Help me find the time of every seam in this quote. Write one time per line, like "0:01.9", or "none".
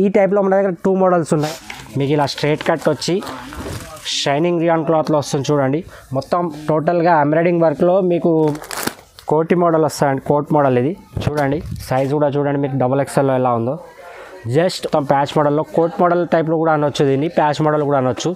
0:01.5
0:08.4
0:14.9